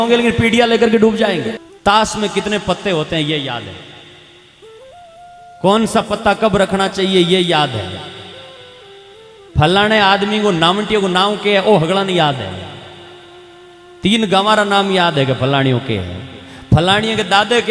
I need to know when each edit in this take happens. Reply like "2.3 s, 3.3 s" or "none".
1.7 s